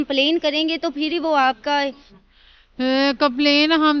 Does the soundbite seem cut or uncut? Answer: cut